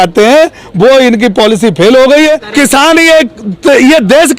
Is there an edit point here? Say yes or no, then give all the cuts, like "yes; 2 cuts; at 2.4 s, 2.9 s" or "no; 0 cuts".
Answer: yes; 1 cut; at 2.5 s